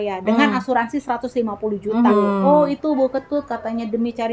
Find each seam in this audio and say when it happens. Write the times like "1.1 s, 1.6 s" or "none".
2.1 s